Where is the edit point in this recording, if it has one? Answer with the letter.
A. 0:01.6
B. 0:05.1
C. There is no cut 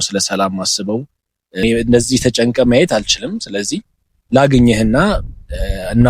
A